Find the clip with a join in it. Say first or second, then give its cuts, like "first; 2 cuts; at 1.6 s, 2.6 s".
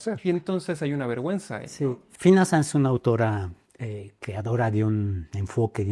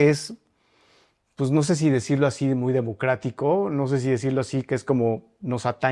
first; 1 cut; at 2.0 s